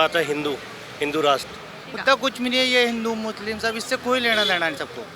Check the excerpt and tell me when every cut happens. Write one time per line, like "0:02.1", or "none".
0:01.8